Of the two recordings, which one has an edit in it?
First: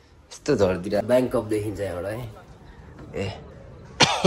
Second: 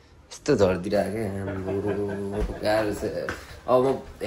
first; 1 cut; at 1.0 s

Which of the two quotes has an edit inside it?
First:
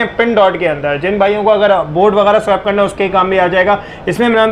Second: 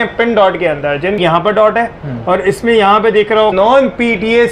second; 2 cuts; at 1.2 s, 3.5 s

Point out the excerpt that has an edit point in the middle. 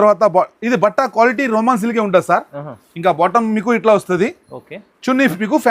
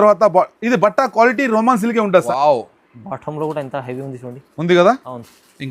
second; 1 cut; at 2.3 s

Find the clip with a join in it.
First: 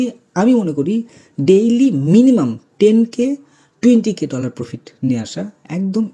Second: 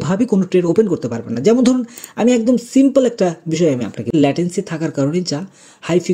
second; 1 cut; at 4.1 s

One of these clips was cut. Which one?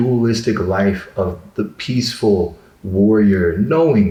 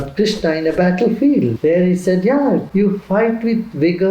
second; 2 cuts; at 1.6 s, 2.7 s

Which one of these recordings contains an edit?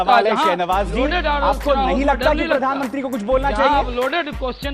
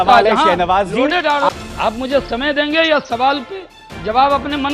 second; 1 cut; at 1.5 s

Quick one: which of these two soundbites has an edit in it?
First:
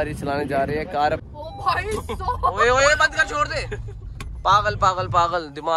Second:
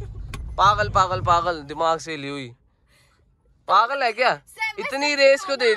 first; 1 cut; at 1.3 s

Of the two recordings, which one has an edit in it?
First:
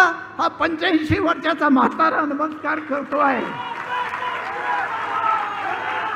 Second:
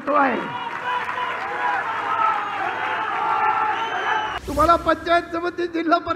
second; 1 cut; at 4.3 s

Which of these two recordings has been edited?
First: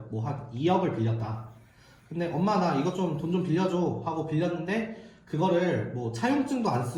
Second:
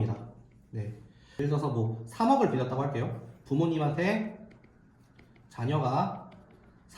second; 1 cut; at 1.2 s

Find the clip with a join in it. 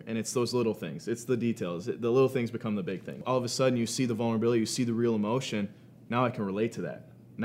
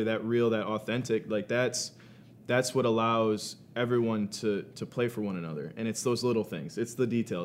first; 1 cut; at 3.2 s

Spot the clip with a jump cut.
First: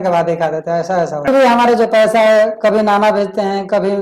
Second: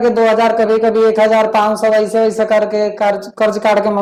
first; 1 cut; at 1.3 s

